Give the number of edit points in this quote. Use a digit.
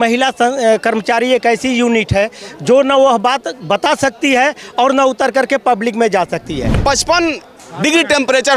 1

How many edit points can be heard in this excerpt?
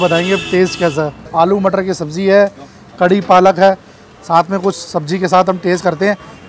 1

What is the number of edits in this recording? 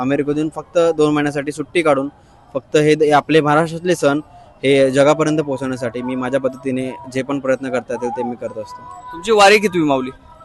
0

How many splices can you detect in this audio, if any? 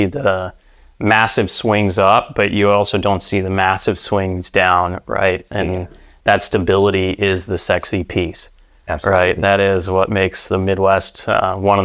0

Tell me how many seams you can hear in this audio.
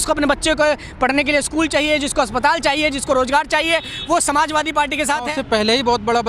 1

